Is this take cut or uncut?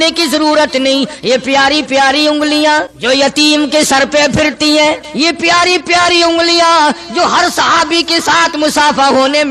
cut